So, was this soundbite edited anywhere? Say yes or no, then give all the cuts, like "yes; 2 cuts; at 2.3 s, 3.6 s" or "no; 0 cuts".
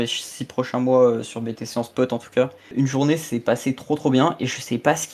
yes; 1 cut; at 2.7 s